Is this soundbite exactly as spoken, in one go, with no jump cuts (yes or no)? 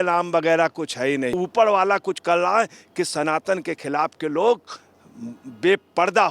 no